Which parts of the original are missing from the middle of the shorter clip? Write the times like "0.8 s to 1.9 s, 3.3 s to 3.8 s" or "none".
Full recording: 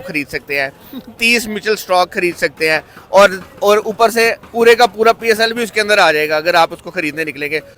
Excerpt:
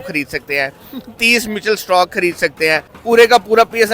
2.9 s to 4.4 s